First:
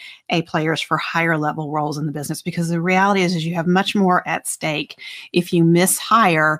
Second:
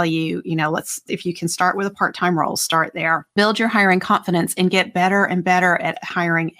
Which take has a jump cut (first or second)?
second